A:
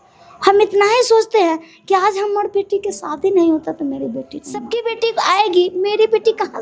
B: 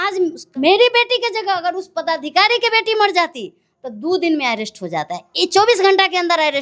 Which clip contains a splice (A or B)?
A